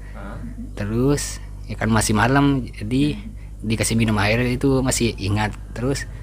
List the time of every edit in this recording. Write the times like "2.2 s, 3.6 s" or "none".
none